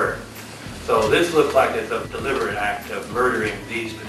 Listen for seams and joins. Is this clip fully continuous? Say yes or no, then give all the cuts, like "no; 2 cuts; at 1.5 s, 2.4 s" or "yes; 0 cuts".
no; 1 cut; at 2.0 s